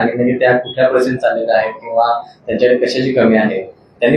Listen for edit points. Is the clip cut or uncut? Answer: uncut